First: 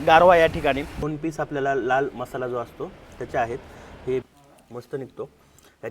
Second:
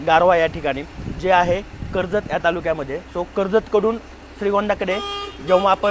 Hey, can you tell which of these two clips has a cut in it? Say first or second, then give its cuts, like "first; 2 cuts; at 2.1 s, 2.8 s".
first; 2 cuts; at 1.1 s, 4.3 s